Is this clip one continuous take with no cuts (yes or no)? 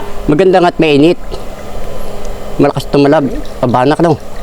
yes